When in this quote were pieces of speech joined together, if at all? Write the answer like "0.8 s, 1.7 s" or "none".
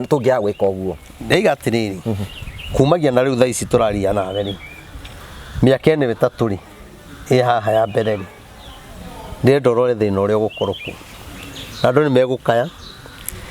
none